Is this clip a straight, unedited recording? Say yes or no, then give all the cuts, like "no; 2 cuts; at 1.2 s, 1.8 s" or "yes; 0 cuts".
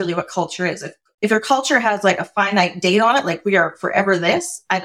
yes; 0 cuts